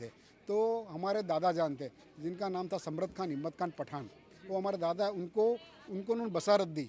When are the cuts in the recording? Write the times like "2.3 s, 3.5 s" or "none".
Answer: none